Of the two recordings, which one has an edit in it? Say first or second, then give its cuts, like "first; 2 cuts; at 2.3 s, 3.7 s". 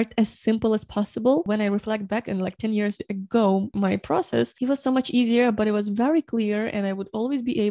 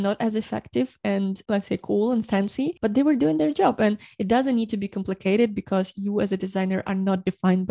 first; 3 cuts; at 1.5 s, 3.7 s, 4.5 s